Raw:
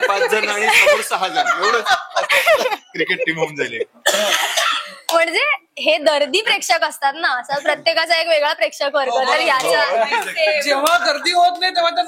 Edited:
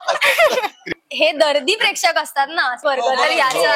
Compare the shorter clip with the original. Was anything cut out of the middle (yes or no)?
yes